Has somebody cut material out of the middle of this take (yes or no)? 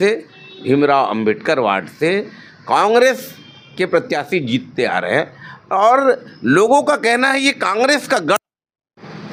no